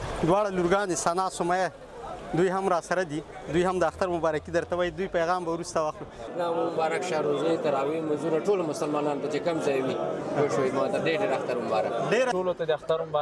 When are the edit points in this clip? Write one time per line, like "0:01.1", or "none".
0:06.3
0:12.3